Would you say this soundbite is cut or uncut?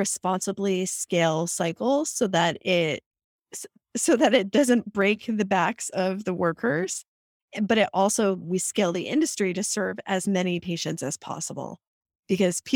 uncut